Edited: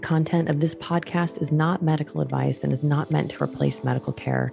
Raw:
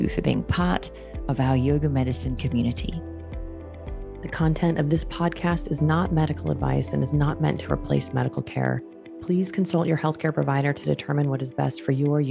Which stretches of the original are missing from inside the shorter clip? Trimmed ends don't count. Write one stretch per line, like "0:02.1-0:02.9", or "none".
none